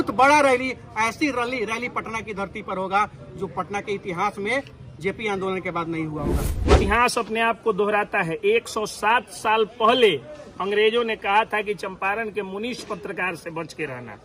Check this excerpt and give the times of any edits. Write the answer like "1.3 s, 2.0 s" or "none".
6.7 s